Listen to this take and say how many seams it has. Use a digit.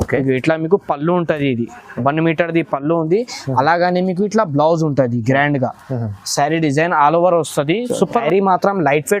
1